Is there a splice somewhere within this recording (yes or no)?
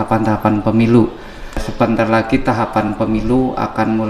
yes